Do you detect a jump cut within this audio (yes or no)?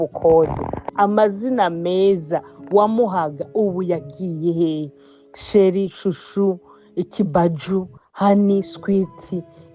yes